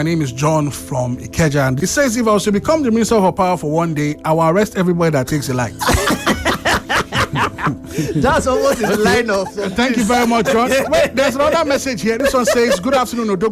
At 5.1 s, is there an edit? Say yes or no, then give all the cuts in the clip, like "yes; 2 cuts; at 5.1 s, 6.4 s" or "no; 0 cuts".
no; 2 cuts; at 1.8 s, 12.2 s